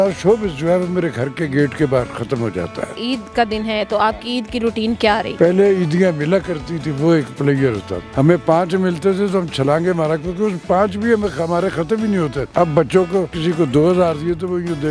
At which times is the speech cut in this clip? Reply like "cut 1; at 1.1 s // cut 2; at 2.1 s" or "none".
cut 1; at 2.9 s // cut 2; at 5.3 s // cut 3; at 8.0 s // cut 4; at 12.4 s // cut 5; at 13.3 s